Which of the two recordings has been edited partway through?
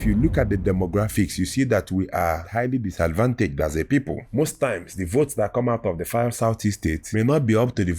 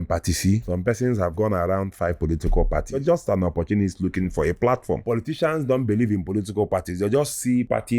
second; 3 cuts; at 1.2 s, 3.0 s, 5.0 s

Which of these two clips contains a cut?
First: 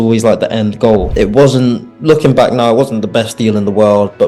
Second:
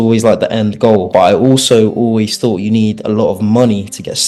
first; 1 cut; at 1.1 s

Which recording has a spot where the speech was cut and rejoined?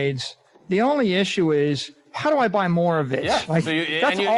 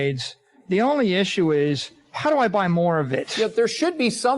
second; 1 cut; at 3.2 s

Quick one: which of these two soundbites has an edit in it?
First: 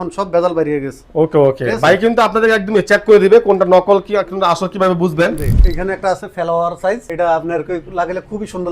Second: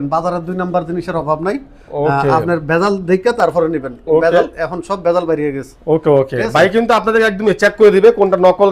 first; 1 cut; at 5.6 s

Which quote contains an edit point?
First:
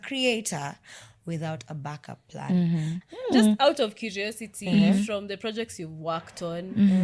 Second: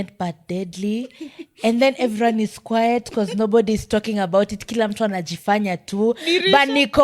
first; 1 cut; at 3.0 s

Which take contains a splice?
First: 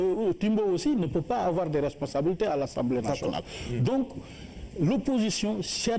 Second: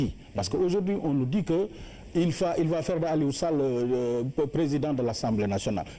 first; 1 cut; at 1.7 s

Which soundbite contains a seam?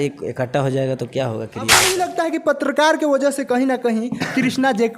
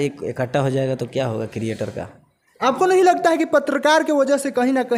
first; 1 cut; at 1.7 s

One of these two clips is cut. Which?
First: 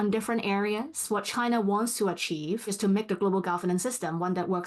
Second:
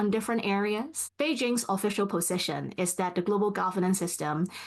first; 2 cuts; at 1.0 s, 2.7 s

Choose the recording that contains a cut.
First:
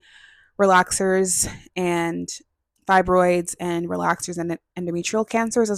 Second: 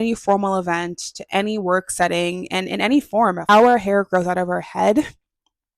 second; 1 cut; at 3.4 s

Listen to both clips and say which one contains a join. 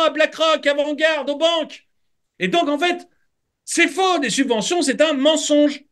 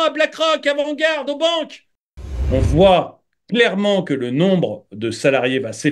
second; 1 cut; at 2.3 s

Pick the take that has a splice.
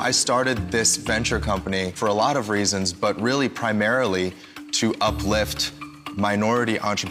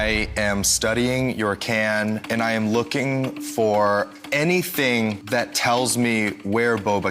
second; 2 cuts; at 2.2 s, 5.2 s

